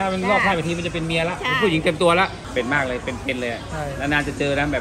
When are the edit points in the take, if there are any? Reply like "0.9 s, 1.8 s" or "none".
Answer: 2.4 s